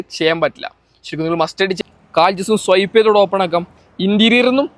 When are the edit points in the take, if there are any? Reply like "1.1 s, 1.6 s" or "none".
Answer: 1.7 s